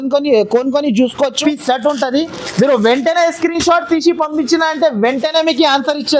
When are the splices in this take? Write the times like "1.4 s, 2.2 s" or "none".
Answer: 1.4 s

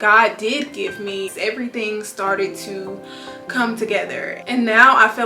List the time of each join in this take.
1.3 s

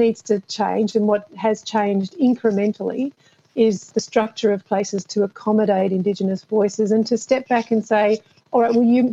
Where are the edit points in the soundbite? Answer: none

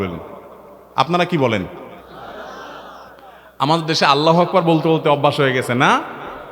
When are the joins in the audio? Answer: none

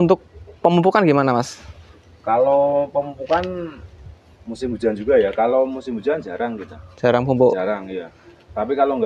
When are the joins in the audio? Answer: none

